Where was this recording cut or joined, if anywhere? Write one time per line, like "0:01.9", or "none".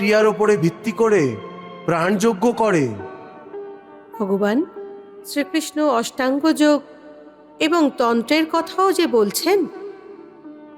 none